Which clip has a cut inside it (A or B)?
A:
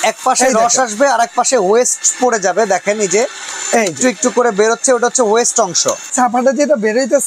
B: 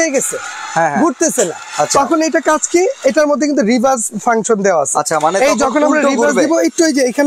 A